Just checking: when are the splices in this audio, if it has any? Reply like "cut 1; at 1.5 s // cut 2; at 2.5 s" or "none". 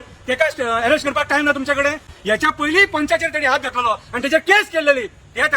none

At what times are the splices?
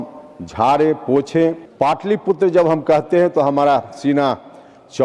cut 1; at 1.6 s

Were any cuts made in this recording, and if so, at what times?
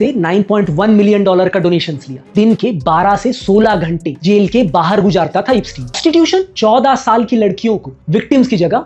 cut 1; at 2.1 s // cut 2; at 6.0 s

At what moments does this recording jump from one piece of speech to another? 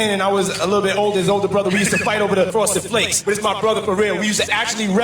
cut 1; at 2.5 s

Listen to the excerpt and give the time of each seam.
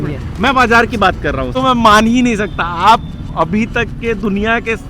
cut 1; at 1.5 s

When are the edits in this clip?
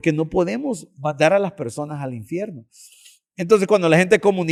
none

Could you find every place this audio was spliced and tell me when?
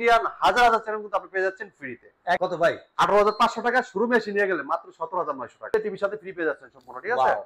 cut 1; at 2.4 s // cut 2; at 5.7 s

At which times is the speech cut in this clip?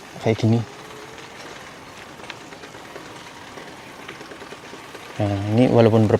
none

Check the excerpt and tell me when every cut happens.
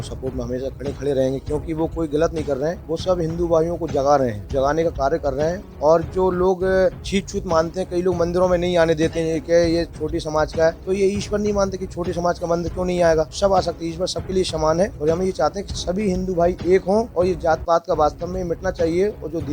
cut 1; at 2.8 s // cut 2; at 4.4 s // cut 3; at 7.0 s // cut 4; at 10.8 s // cut 5; at 13.3 s // cut 6; at 15.0 s // cut 7; at 17.1 s

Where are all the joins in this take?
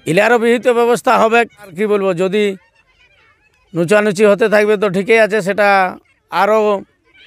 cut 1; at 1.7 s

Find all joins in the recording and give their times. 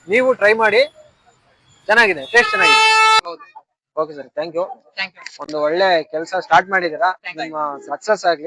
none

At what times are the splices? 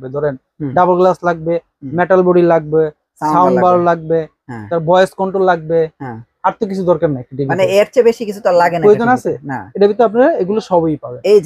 none

